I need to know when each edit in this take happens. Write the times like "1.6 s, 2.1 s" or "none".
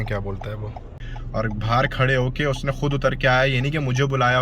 1.0 s